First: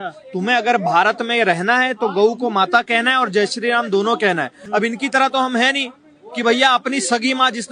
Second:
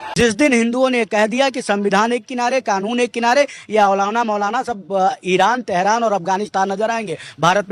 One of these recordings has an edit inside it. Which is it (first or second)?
first